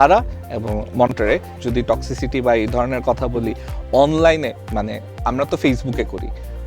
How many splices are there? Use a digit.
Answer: 1